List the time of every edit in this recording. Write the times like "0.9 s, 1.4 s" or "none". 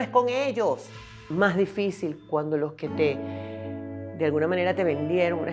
1.3 s